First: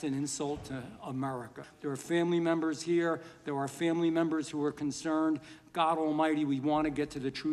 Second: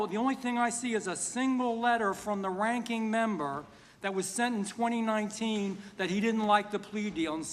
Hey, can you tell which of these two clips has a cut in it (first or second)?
first